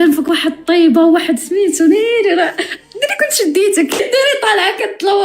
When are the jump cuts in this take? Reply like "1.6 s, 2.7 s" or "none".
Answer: 4.0 s